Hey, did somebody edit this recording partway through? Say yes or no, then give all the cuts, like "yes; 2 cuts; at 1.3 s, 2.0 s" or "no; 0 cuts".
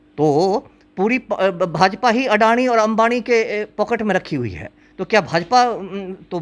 no; 0 cuts